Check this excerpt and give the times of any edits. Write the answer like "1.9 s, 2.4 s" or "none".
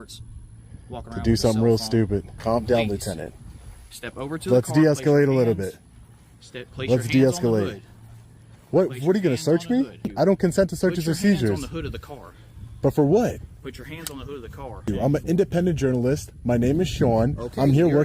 2.4 s, 10.1 s, 14.9 s